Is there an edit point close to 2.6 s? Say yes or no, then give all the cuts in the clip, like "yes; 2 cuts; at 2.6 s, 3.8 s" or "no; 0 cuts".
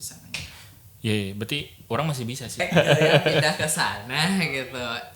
yes; 1 cut; at 2.6 s